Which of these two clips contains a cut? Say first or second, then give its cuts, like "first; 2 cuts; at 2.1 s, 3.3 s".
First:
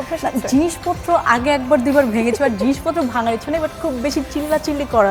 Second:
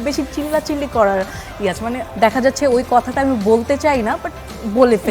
second; 1 cut; at 2.0 s